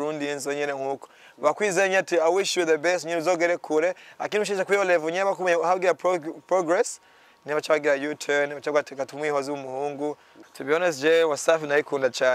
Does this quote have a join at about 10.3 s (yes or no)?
yes